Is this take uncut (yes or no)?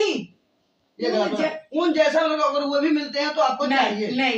yes